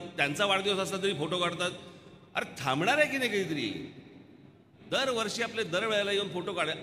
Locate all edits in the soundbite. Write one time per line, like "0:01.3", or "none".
0:04.7